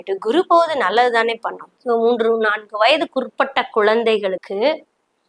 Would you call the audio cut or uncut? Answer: cut